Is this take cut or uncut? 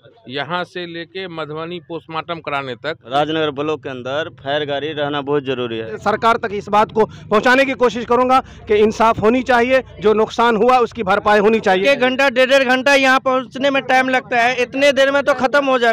cut